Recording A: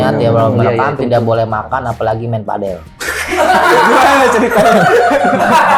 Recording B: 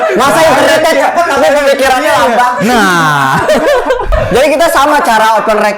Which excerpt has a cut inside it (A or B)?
B